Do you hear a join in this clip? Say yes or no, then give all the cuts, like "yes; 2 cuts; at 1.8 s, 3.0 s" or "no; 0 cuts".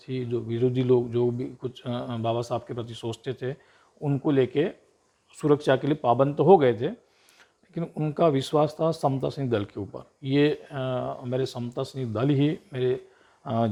no; 0 cuts